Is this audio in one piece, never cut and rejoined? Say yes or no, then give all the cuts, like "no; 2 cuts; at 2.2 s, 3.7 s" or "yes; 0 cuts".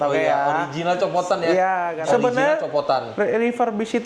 no; 1 cut; at 2.0 s